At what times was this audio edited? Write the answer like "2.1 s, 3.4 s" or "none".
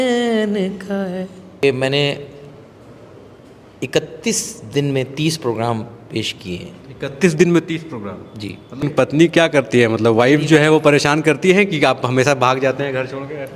1.6 s, 8.8 s